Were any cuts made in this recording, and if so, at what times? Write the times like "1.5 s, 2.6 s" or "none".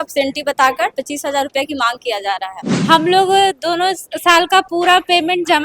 2.7 s